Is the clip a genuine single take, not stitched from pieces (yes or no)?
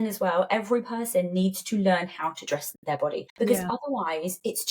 no